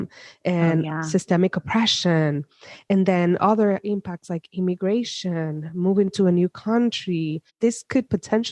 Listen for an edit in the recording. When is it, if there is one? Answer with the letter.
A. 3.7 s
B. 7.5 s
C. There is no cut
B